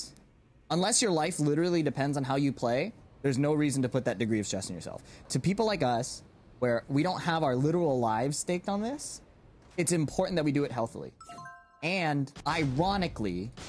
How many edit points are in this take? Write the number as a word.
two